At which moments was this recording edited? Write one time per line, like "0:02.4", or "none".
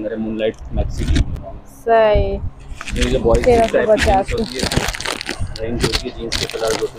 none

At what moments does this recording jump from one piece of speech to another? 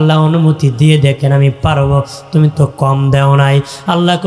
none

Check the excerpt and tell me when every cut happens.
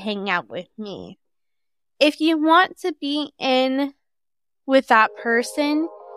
0:01.2

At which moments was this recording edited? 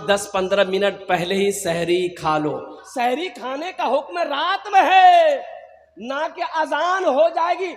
0:02.8

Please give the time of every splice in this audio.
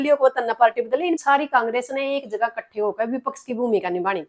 0:01.2

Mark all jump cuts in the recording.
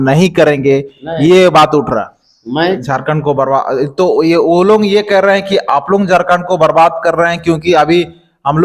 0:02.8

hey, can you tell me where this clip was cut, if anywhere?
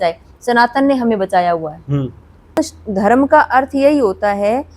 0:02.6

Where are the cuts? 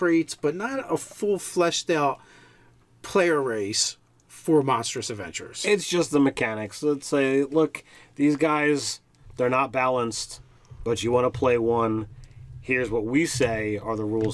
0:05.7

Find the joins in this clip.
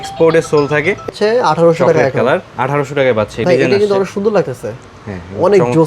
0:01.1
0:03.4

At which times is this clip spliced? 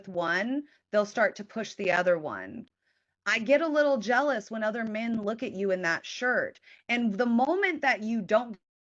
0:02.6

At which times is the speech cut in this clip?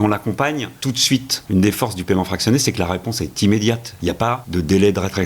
0:01.0
0:04.1

